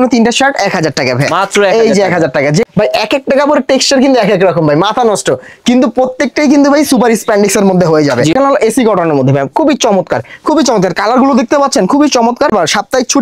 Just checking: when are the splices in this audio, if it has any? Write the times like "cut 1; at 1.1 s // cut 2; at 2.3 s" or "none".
cut 1; at 2.7 s // cut 2; at 8.3 s // cut 3; at 12.5 s

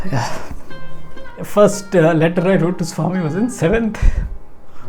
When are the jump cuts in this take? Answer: cut 1; at 1.4 s

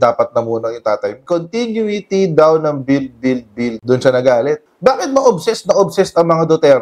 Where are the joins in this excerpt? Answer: cut 1; at 1.2 s

